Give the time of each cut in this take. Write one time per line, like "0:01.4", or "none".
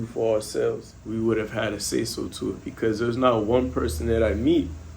0:00.9